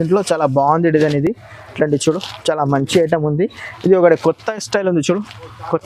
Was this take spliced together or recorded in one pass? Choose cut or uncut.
uncut